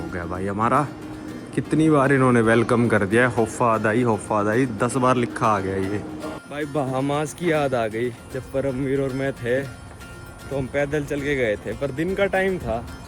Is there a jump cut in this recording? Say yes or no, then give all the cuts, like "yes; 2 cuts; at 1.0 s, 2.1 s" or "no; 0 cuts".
yes; 1 cut; at 6.3 s